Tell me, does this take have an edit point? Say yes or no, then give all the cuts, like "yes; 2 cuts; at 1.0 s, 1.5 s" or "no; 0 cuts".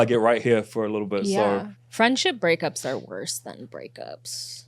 yes; 1 cut; at 1.8 s